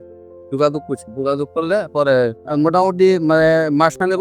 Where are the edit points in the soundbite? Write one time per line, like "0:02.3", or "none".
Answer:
0:02.4